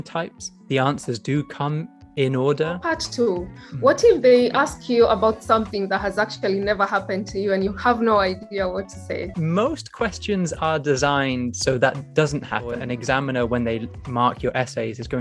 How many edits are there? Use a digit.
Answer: 3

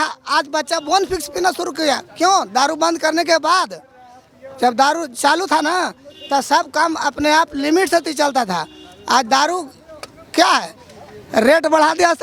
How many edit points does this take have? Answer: 0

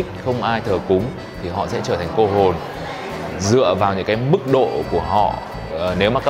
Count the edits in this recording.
0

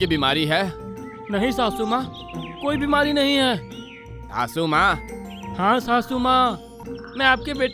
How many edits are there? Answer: 1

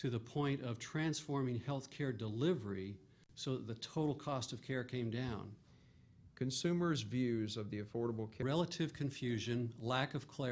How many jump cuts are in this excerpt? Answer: 0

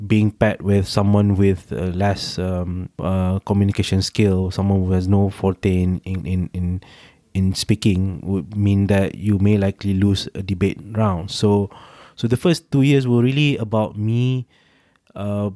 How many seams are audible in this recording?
1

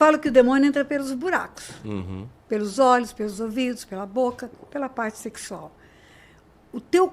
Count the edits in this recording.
0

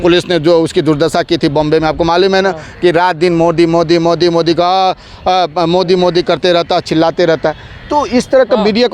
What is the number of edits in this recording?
0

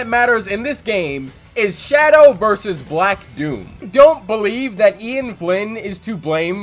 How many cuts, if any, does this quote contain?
1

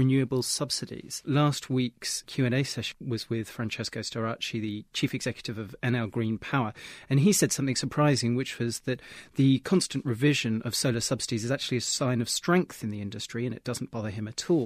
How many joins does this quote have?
3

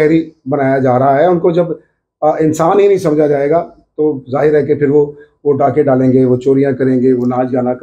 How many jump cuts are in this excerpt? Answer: 0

